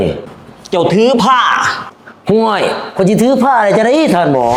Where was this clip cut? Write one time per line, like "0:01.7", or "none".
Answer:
none